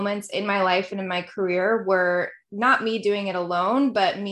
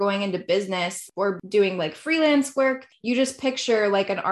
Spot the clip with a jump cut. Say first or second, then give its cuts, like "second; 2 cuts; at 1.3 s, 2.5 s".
second; 2 cuts; at 1.1 s, 2.9 s